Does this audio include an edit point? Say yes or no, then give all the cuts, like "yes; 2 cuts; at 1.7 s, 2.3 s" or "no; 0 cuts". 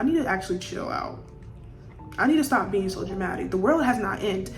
no; 0 cuts